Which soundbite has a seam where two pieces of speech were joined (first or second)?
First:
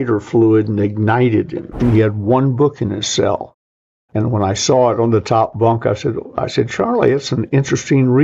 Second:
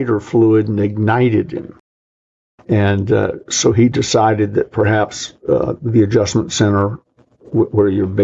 first